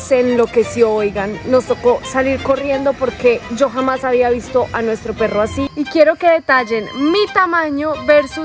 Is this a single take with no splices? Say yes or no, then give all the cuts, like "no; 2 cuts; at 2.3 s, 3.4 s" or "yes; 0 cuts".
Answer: no; 1 cut; at 5.7 s